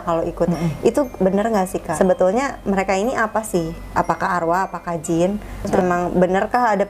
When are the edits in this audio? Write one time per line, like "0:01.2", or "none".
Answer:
0:01.8
0:05.7